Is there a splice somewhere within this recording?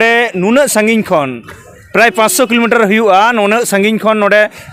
no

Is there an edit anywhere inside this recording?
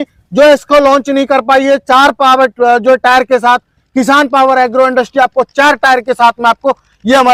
no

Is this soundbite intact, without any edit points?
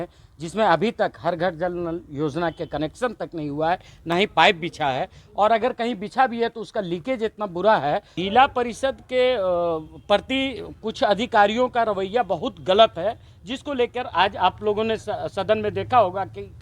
no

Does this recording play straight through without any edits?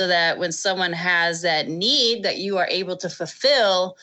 yes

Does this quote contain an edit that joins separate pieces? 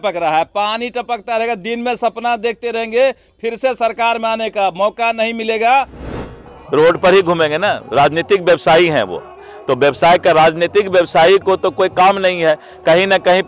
yes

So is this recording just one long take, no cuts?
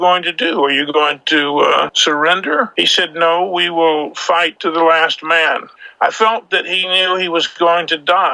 no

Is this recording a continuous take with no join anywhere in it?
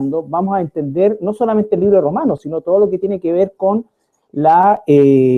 yes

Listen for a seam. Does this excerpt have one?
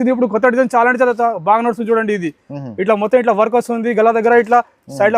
no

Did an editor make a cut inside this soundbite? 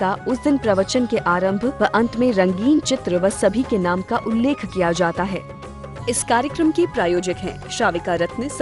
yes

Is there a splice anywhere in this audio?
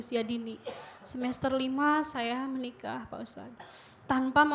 no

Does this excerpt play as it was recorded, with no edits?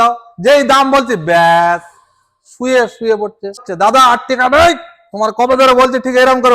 no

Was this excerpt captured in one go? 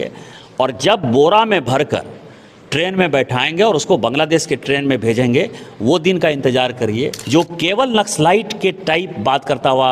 no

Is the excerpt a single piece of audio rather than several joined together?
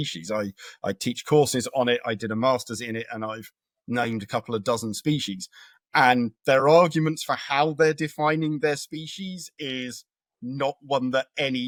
yes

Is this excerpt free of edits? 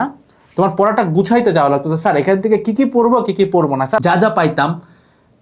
no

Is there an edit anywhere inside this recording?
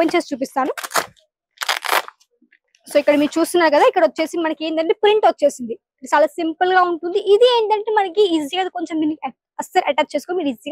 no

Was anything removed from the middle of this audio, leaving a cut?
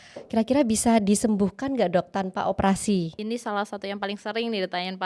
yes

